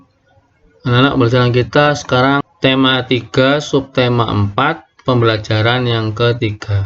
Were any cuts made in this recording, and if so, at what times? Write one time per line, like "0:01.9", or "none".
0:02.4